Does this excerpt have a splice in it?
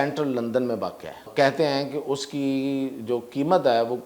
yes; 1 cut; at 1.3 s

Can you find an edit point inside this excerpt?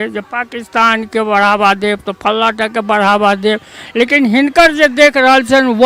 no; 0 cuts

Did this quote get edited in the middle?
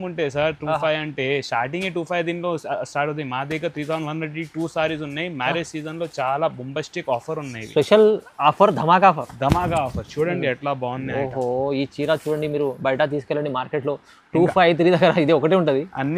no; 0 cuts

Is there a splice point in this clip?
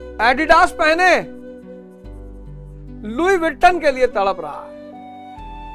no; 0 cuts

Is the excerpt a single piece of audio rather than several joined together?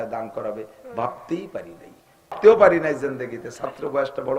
no; 1 cut; at 2.3 s

